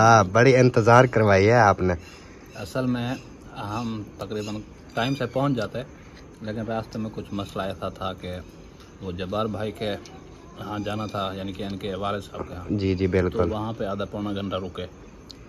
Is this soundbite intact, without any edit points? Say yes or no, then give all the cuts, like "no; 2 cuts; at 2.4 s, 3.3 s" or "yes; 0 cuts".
yes; 0 cuts